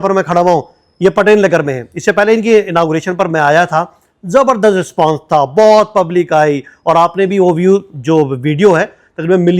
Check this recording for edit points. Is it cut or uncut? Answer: uncut